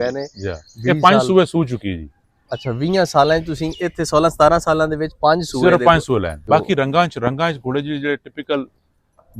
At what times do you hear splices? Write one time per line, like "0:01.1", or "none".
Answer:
0:06.4